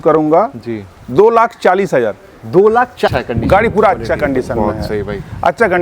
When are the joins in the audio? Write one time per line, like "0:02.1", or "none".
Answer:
0:03.1